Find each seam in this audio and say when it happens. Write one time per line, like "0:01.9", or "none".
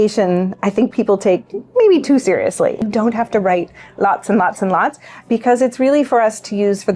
0:02.8